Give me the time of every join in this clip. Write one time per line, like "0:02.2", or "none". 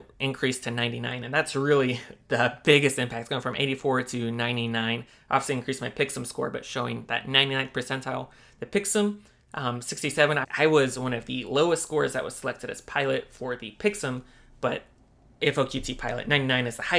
0:10.4

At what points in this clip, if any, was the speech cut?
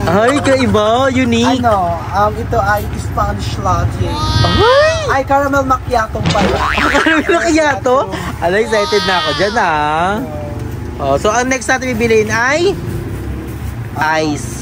none

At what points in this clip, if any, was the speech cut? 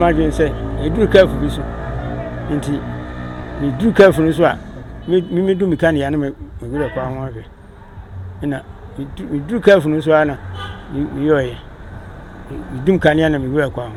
none

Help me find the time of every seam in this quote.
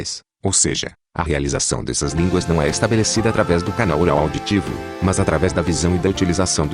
none

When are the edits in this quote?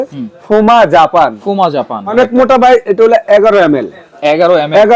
0:02.1

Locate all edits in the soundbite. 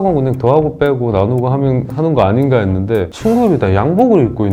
0:03.1

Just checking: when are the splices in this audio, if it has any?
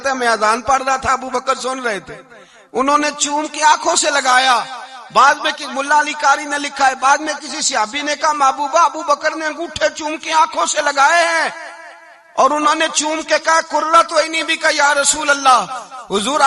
none

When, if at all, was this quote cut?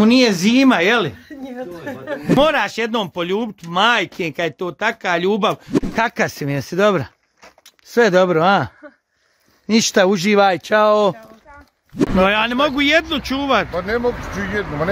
0:02.4
0:05.7
0:12.0

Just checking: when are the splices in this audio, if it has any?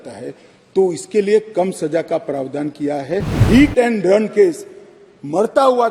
0:03.4

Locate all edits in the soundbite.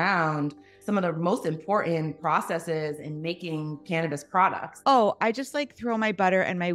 0:04.7

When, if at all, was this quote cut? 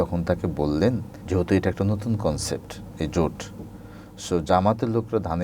0:01.1

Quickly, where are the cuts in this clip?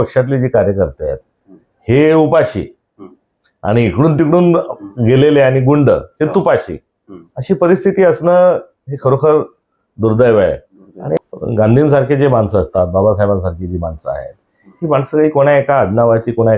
0:11.3

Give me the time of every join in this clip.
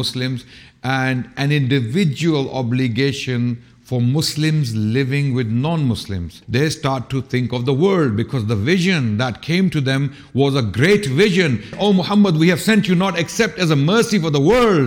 0:06.4
0:11.7

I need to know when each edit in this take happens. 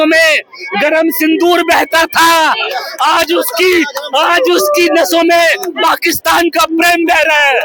none

